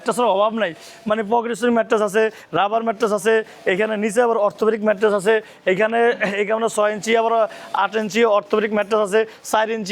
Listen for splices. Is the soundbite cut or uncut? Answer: uncut